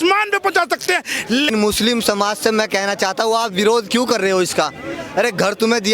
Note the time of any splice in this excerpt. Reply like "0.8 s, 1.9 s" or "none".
1.5 s